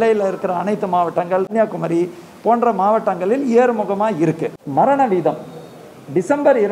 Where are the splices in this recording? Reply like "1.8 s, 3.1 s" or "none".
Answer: 1.5 s, 4.5 s